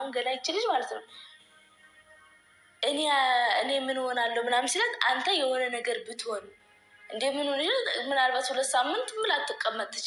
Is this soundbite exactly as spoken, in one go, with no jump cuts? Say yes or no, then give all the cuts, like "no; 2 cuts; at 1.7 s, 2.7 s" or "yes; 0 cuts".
yes; 0 cuts